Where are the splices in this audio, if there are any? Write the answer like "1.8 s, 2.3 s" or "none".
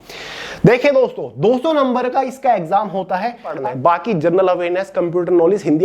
3.5 s